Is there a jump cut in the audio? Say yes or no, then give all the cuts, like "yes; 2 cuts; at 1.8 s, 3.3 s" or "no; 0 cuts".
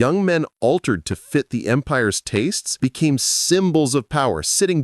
yes; 1 cut; at 2.6 s